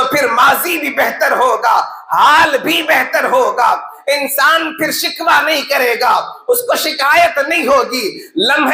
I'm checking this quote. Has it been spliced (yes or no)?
no